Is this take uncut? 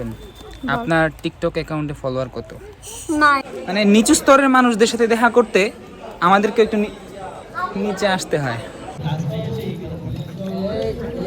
no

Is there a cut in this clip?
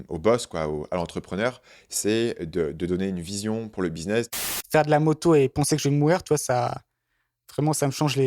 yes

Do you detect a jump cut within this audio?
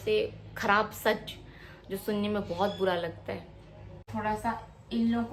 yes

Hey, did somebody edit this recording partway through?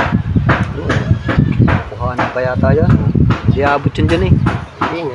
no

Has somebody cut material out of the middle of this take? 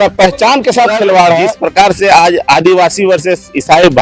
yes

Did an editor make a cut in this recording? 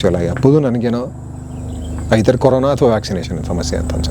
no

